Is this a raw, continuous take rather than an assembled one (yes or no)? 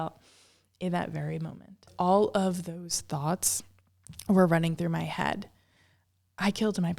no